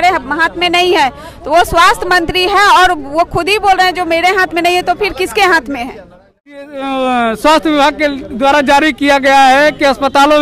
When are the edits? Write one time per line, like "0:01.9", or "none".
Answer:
0:06.6